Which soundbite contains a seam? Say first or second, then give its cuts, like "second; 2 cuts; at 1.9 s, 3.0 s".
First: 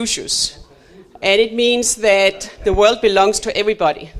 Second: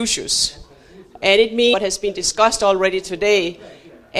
first; 1 cut; at 1.7 s